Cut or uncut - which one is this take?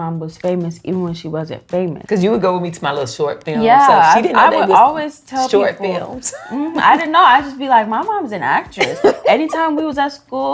cut